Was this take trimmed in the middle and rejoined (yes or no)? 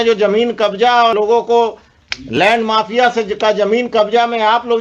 yes